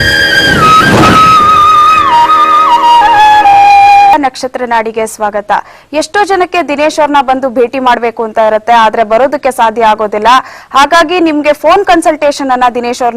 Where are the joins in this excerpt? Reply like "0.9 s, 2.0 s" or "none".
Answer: 4.1 s